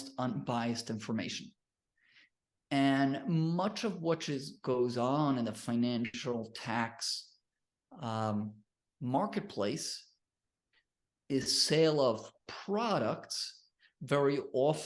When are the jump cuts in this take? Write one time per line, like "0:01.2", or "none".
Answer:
none